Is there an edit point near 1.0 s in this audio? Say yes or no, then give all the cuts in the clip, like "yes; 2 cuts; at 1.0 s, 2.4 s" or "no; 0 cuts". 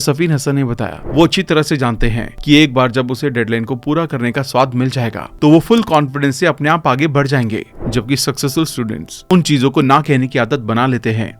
yes; 2 cuts; at 1.0 s, 7.8 s